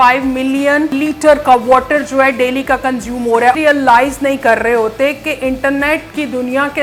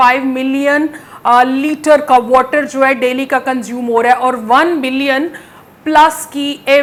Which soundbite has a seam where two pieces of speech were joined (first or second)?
first